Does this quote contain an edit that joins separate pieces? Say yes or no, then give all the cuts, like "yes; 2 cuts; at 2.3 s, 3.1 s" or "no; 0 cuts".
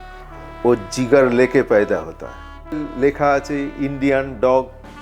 yes; 1 cut; at 2.9 s